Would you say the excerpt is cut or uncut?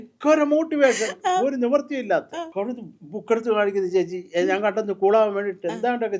cut